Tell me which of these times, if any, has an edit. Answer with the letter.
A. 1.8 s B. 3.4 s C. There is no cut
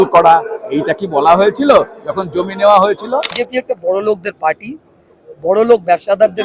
B